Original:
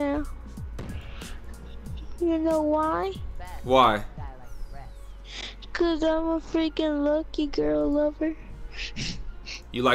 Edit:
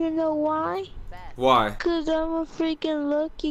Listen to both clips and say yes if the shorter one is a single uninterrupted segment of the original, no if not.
no